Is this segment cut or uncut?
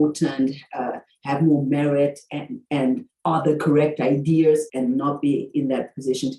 uncut